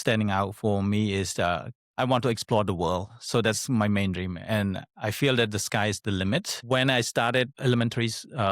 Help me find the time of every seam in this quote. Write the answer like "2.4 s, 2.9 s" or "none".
6.5 s, 7.5 s